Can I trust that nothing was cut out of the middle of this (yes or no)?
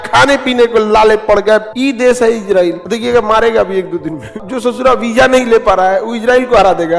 no